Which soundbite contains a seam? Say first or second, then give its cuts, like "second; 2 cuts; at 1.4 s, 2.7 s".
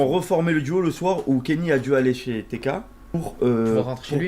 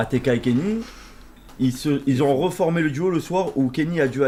first; 1 cut; at 3.0 s